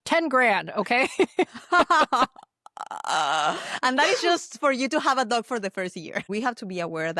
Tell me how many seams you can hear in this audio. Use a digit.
1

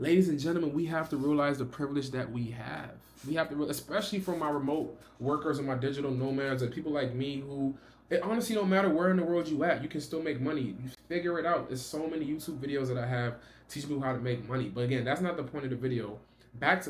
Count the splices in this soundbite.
0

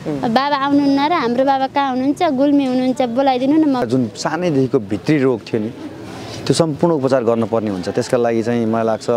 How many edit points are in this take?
1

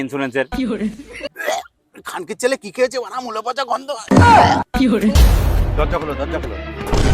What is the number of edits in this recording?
1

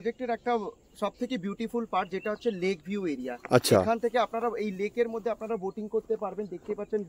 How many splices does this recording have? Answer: 0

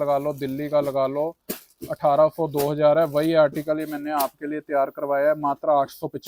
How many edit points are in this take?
0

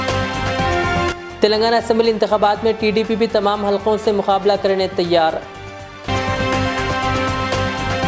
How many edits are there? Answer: 1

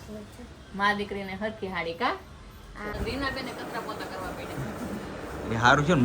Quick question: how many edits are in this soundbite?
1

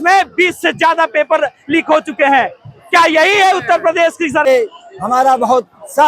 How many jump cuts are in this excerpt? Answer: 1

